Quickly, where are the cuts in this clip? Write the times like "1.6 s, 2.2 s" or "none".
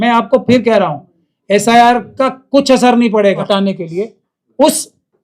3.3 s